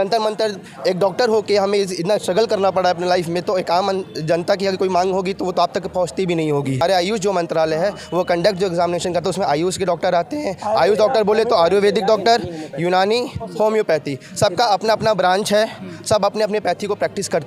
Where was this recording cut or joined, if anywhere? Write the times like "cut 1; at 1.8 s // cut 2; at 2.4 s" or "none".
cut 1; at 6.8 s

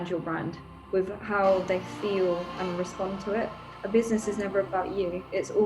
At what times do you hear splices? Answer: cut 1; at 3.7 s

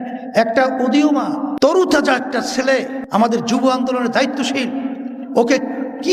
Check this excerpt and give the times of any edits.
cut 1; at 1.7 s // cut 2; at 3.0 s

